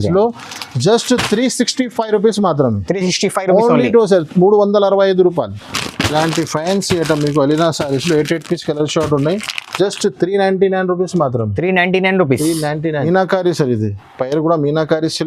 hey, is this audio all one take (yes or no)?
no